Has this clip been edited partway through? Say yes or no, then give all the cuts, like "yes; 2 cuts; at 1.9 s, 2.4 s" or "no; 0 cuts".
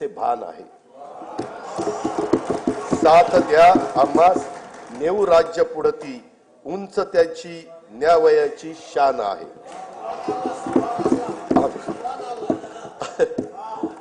no; 0 cuts